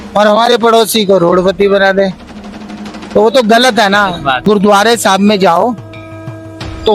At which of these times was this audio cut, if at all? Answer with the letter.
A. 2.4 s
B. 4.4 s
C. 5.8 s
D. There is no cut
B